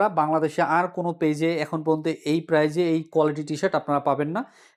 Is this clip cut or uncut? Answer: uncut